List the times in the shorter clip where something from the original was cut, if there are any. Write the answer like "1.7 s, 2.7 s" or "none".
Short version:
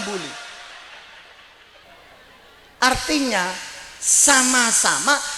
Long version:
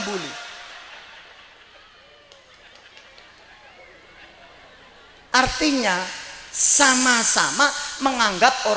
1.8 s

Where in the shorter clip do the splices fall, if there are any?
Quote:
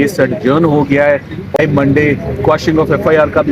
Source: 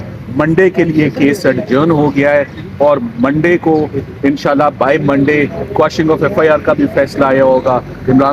1.6 s

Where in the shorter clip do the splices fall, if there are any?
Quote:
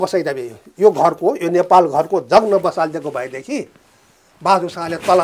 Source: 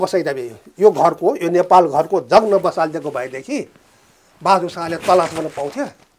none

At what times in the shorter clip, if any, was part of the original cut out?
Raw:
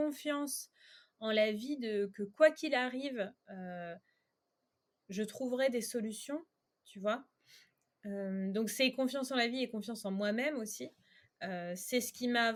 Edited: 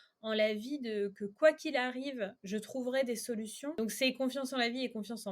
2.4 s, 3.8 s

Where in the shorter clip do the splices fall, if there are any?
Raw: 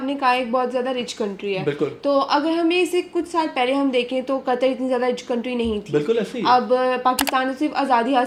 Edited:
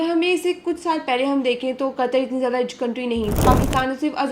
3.4 s

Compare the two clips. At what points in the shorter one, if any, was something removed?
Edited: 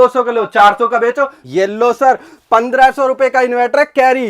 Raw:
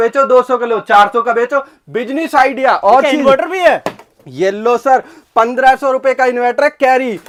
1.4 s

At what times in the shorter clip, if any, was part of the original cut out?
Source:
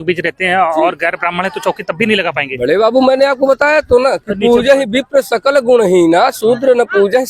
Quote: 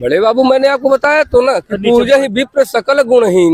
none

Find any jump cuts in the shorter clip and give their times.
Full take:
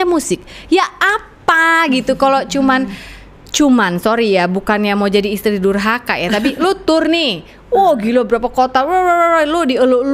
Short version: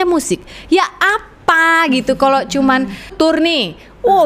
3.1 s

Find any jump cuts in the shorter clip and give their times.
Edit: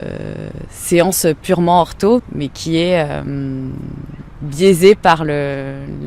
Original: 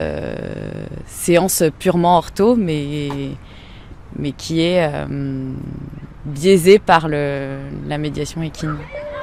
2.2 s

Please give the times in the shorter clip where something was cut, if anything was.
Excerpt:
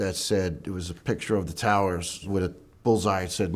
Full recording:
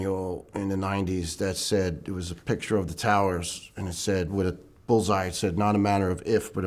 2.2 s

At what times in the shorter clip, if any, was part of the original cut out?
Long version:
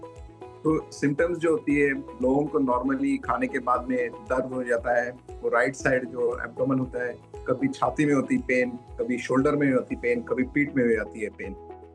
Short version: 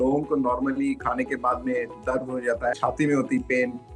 2.7 s

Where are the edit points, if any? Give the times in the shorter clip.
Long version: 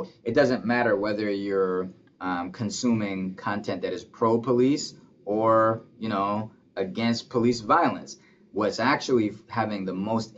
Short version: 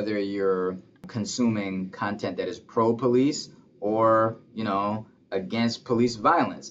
1.0 s

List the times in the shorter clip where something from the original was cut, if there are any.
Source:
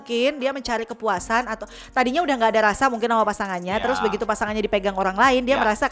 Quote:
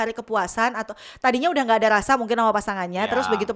none

